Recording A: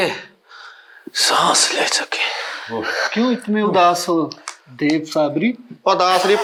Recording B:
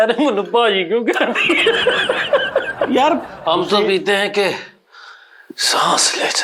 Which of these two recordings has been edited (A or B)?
B